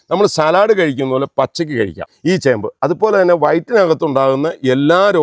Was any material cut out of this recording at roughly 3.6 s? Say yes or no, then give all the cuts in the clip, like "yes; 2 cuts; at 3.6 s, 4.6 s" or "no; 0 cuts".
no; 1 cut; at 2.1 s